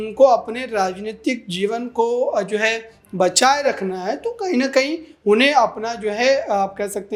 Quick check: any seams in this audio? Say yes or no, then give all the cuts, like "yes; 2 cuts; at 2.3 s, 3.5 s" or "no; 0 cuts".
no; 0 cuts